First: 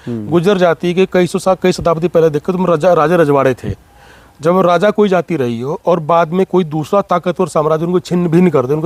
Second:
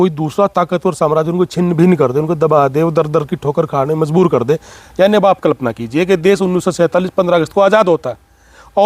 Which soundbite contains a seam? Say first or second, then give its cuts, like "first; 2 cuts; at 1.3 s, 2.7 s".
second; 1 cut; at 4.8 s